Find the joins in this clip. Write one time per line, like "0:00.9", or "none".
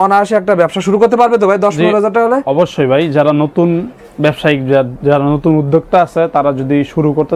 none

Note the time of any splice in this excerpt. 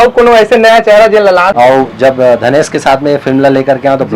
0:01.5

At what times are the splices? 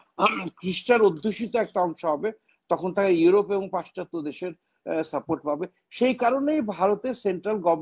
none

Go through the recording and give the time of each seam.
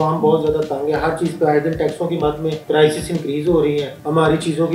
none

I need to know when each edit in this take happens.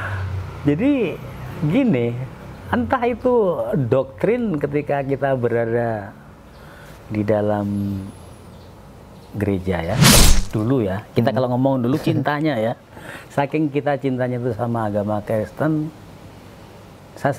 0:10.2

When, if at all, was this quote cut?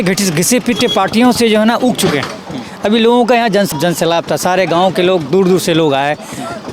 0:03.7

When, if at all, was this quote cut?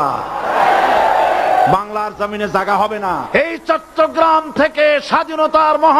0:03.3

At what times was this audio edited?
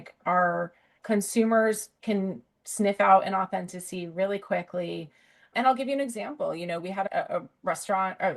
0:07.1

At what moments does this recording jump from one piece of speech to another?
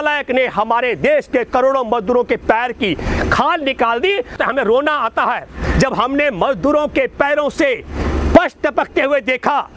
0:04.3

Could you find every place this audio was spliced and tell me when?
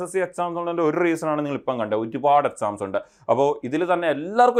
none

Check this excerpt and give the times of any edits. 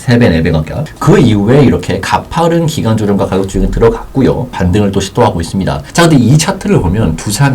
0:04.5
0:05.8

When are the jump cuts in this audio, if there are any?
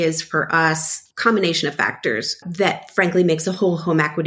0:00.9
0:02.4

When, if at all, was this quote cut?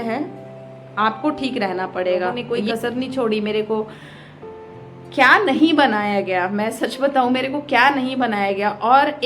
0:02.4

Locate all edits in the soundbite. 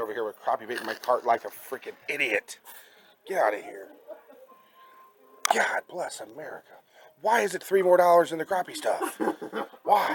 none

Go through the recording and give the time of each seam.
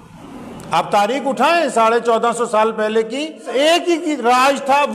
0:03.4

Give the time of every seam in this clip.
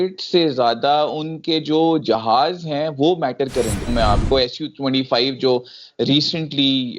0:03.9

